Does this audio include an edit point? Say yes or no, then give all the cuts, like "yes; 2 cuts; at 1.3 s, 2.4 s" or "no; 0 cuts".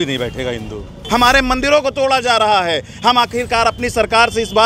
yes; 1 cut; at 1.0 s